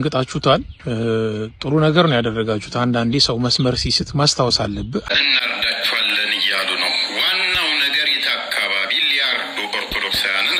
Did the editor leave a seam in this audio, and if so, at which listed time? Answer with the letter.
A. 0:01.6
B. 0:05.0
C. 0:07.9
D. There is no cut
B